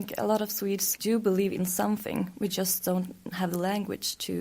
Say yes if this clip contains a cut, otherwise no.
yes